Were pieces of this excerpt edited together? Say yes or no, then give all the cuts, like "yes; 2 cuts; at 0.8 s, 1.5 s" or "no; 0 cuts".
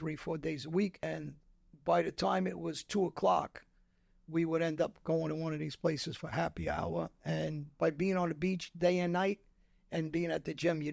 yes; 1 cut; at 1.0 s